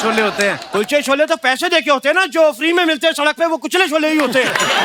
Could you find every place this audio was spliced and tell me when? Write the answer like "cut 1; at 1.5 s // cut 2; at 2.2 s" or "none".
none